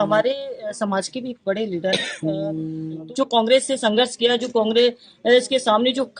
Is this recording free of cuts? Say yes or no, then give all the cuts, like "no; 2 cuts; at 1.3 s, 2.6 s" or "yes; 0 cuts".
no; 1 cut; at 3.0 s